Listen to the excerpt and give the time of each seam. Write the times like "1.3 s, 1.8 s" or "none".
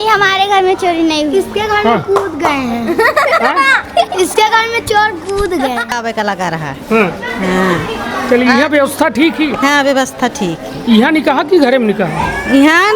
6.0 s